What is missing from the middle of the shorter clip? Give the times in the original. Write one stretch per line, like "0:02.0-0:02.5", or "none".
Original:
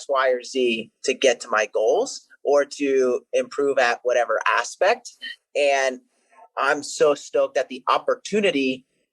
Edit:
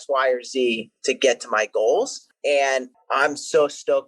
0:02.2-0:05.4
0:06.1-0:06.4

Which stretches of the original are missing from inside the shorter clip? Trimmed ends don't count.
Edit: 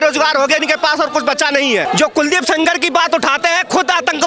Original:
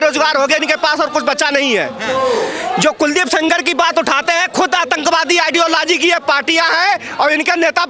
0:01.8-0:02.7

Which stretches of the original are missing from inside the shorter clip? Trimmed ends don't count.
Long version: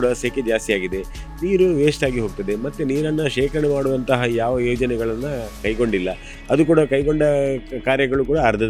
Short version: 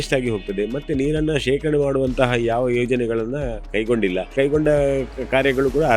0:06.2-0:06.9

